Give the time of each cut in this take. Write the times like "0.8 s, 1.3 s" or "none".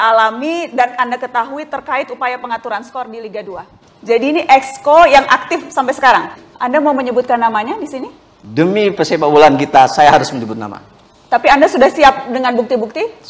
3.8 s